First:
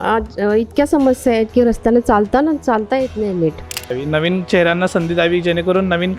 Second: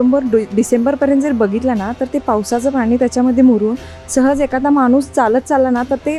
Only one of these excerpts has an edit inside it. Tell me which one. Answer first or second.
first